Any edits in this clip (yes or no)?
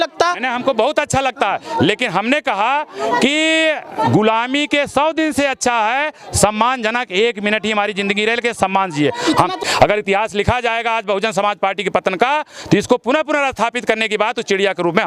yes